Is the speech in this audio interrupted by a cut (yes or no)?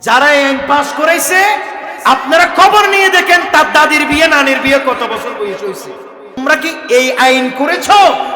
yes